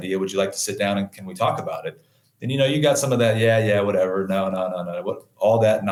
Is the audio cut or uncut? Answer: uncut